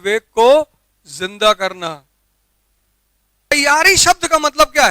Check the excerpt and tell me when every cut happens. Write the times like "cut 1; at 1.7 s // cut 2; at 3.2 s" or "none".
cut 1; at 3.5 s